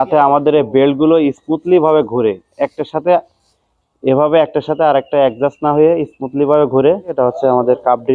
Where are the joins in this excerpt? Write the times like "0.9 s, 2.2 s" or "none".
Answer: 7.1 s